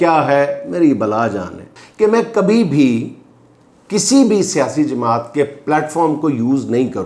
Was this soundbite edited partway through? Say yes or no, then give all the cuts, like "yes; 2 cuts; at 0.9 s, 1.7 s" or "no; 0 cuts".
yes; 1 cut; at 1.7 s